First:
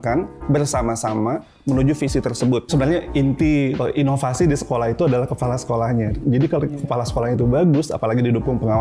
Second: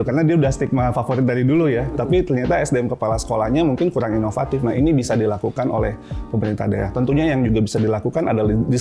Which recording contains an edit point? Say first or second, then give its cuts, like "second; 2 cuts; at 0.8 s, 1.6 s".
first; 3 cuts; at 2.7 s, 3.8 s, 6.2 s